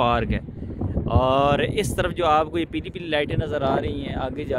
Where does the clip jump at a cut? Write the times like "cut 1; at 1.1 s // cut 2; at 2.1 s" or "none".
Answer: none